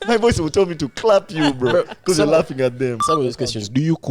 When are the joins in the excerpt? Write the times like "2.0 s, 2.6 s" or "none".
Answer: 3.0 s